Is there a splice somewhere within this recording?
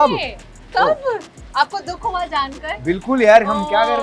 no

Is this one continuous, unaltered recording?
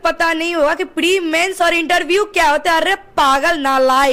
yes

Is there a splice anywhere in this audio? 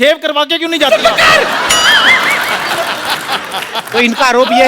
no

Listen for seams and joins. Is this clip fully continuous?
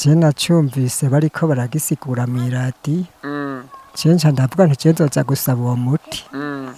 yes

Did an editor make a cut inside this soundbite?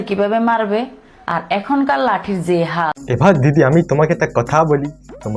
yes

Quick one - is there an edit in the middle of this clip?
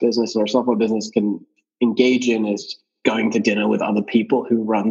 yes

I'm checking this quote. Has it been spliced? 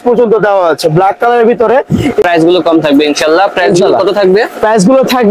yes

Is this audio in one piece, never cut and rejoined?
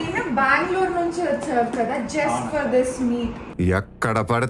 no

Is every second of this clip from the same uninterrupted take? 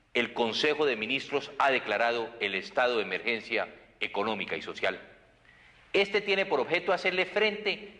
no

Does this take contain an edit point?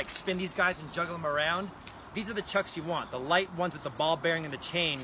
no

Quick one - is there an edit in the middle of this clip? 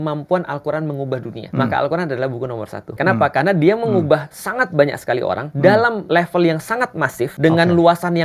yes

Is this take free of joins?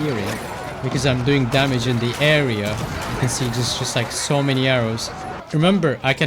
no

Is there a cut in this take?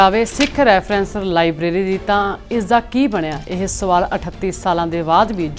no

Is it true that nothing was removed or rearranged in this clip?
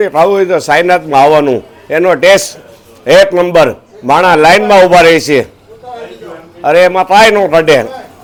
yes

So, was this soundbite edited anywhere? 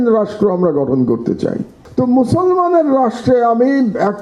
yes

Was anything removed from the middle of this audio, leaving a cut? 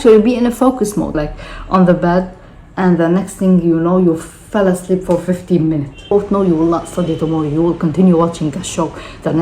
yes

